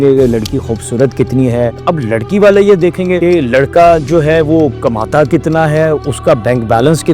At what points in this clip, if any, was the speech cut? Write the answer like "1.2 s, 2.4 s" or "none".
1.8 s